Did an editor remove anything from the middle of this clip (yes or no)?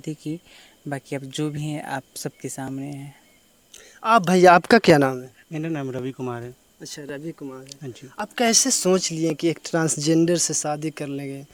no